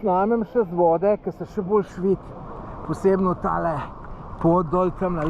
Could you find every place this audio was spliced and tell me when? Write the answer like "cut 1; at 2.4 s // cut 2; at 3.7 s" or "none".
none